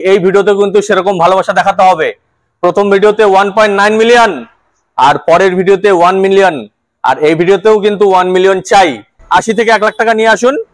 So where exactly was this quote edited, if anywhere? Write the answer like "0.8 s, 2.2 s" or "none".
9.1 s